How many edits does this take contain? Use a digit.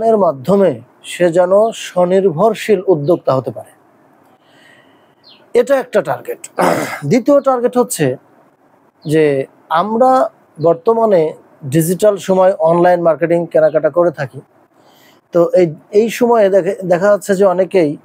0